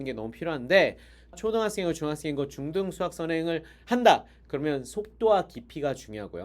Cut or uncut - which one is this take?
cut